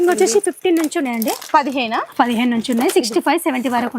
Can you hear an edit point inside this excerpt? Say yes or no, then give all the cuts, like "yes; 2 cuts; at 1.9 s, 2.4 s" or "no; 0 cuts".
no; 0 cuts